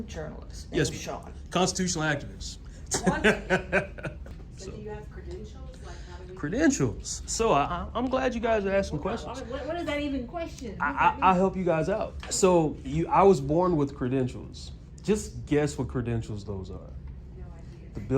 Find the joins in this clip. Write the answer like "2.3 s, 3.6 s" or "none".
4.5 s